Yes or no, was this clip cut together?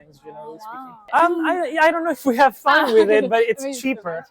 yes